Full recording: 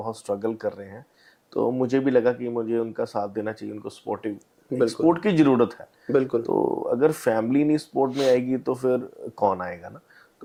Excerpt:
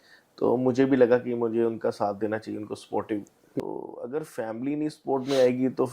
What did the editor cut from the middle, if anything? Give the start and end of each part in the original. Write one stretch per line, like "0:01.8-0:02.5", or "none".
0:04.7-0:06.5